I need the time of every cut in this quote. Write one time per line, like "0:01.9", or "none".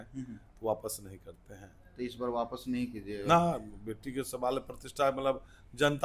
none